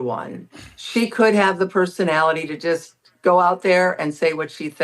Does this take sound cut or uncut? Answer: cut